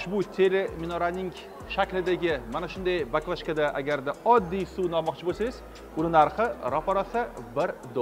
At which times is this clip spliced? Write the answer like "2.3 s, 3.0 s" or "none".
none

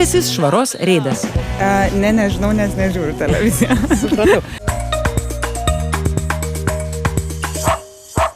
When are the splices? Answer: 4.5 s

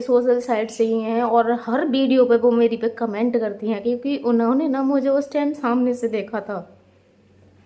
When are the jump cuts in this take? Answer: none

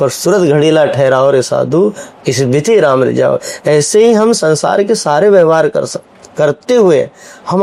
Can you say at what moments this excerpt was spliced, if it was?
none

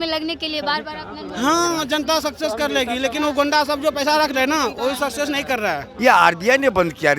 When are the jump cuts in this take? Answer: 5.6 s

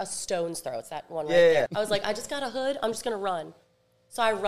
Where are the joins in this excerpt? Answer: 1.7 s

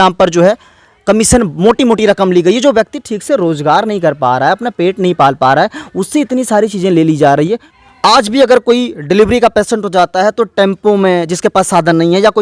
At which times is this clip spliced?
7.5 s

